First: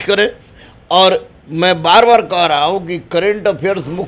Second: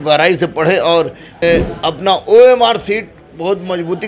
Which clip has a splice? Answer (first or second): second